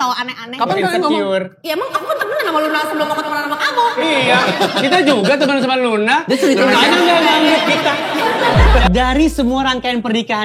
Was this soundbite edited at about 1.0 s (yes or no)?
no